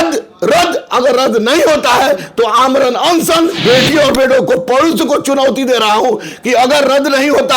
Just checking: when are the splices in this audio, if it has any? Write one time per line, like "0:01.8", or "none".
0:03.6

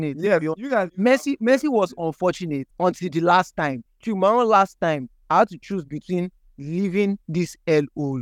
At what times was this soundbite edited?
0:00.9
0:02.7

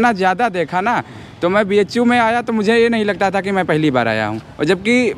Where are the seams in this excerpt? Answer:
none

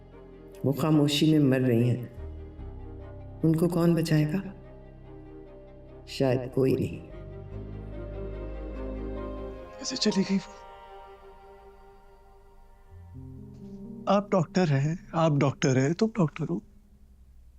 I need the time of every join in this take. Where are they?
0:09.5

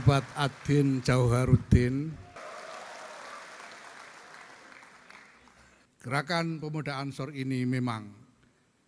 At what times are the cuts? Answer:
0:02.4
0:05.9

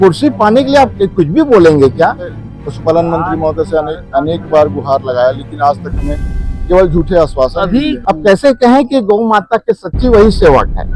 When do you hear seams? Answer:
0:02.3
0:08.0

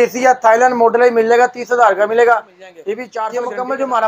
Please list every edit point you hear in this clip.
0:03.1

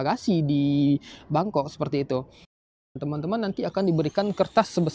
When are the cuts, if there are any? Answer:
0:02.6

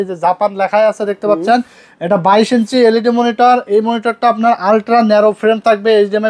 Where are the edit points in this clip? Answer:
none

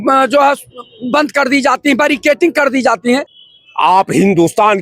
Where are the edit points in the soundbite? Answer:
0:03.4

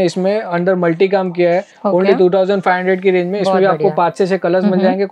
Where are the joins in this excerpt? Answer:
none

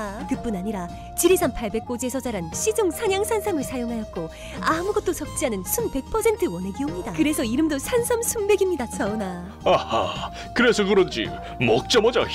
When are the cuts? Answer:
none

